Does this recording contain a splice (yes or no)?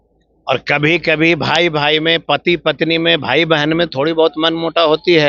no